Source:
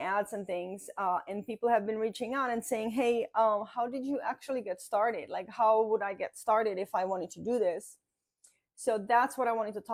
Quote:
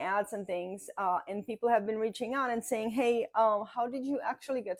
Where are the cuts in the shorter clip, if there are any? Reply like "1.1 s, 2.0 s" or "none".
none